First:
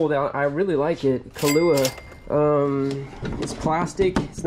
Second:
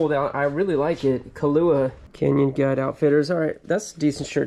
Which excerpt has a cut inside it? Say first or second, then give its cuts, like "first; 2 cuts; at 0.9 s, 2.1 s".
second; 1 cut; at 2.0 s